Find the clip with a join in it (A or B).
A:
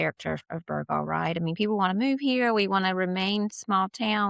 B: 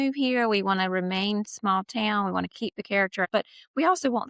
B